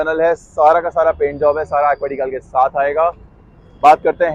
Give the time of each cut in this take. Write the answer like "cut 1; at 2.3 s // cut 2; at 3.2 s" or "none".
none

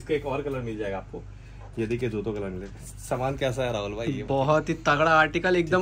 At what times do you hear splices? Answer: none

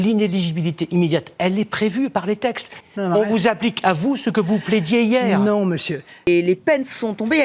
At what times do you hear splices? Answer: cut 1; at 2.8 s // cut 2; at 6.3 s

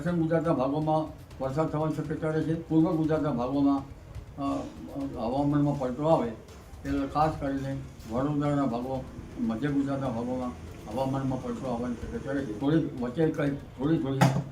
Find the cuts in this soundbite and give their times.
cut 1; at 2.6 s // cut 2; at 12.5 s

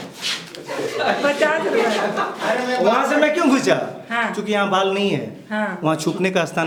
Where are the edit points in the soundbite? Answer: none

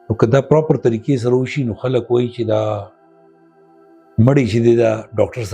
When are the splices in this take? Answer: none

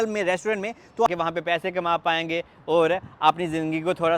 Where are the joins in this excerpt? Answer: cut 1; at 1.1 s

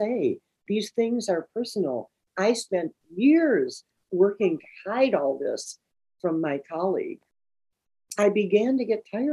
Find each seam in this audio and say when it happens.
cut 1; at 2.2 s // cut 2; at 7.3 s

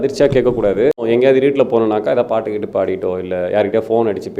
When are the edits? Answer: cut 1; at 1.1 s

